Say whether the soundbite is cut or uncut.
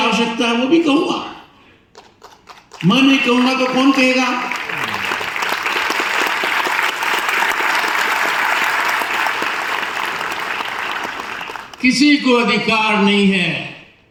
uncut